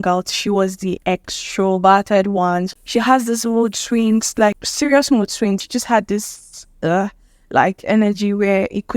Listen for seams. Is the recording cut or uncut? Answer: cut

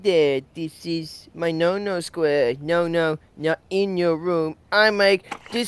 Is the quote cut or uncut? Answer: uncut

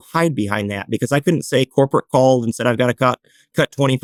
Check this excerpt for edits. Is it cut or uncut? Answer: uncut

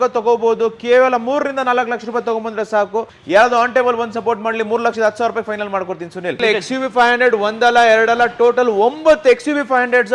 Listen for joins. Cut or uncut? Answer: cut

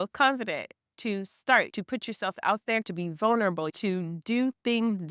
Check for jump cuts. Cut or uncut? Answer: cut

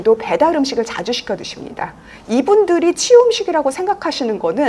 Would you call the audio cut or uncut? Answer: cut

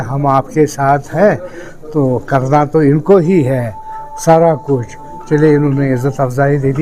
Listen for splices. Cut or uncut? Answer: uncut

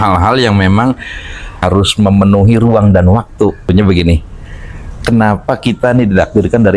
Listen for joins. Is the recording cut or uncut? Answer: cut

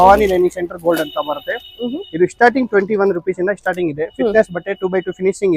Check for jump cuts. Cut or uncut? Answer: uncut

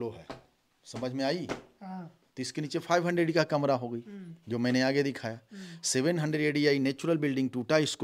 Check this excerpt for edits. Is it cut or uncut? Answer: uncut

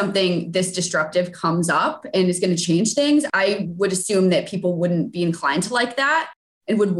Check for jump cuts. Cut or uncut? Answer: uncut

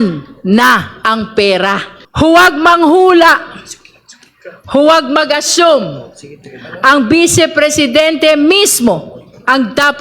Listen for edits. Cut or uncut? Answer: cut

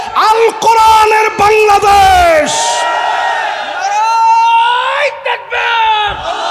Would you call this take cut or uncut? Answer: uncut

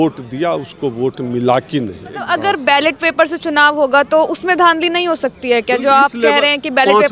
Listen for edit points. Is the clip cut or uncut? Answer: cut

